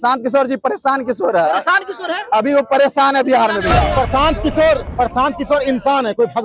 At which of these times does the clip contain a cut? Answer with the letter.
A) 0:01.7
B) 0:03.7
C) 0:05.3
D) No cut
B